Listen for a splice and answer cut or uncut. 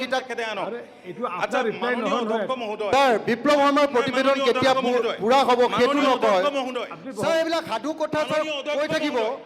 uncut